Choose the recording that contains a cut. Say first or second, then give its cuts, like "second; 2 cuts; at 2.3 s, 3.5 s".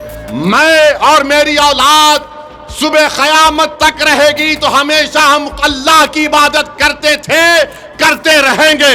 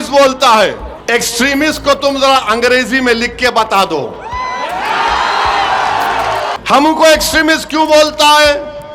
second; 2 cuts; at 0.9 s, 6.6 s